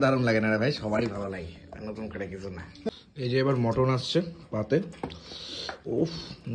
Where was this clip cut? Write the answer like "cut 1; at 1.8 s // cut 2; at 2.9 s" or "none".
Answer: cut 1; at 2.9 s